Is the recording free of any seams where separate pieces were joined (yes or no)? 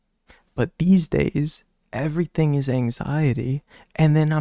yes